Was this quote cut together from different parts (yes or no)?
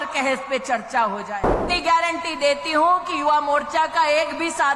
yes